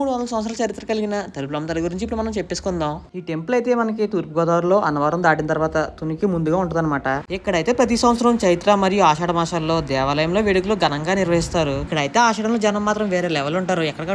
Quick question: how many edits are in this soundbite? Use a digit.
3